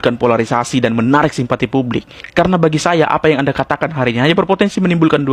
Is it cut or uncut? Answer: uncut